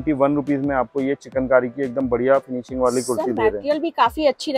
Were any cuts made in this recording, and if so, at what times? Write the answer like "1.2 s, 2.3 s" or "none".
none